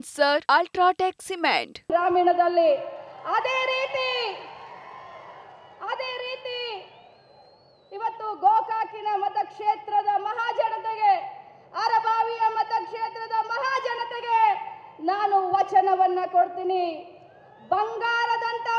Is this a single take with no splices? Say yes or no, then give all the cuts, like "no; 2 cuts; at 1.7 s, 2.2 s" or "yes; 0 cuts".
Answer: no; 1 cut; at 1.9 s